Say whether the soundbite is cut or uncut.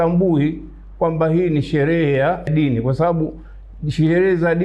cut